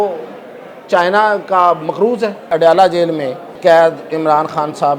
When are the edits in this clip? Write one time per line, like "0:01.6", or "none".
0:02.4
0:03.4